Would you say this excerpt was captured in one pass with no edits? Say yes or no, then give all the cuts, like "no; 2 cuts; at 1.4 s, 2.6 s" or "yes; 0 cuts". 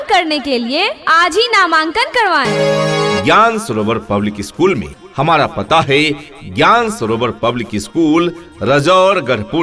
no; 1 cut; at 3.2 s